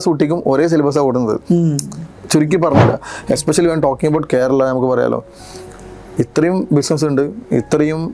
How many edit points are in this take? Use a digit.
1